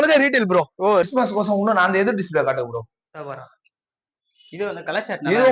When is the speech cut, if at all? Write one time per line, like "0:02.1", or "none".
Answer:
0:01.1